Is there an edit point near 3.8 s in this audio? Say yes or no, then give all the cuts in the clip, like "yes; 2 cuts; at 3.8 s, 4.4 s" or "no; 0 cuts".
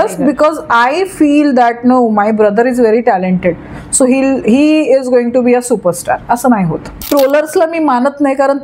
no; 1 cut; at 6.9 s